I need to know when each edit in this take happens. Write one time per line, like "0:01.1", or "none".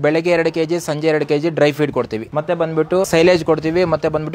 0:02.3
0:03.1

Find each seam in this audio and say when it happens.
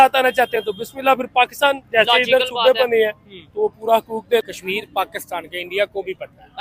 0:04.4

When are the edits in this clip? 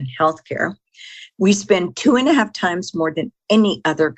none

